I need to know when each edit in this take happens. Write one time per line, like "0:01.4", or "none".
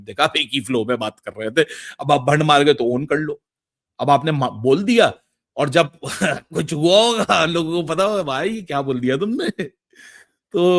none